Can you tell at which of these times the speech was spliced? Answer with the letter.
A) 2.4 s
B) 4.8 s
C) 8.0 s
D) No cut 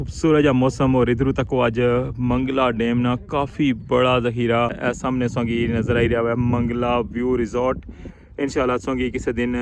B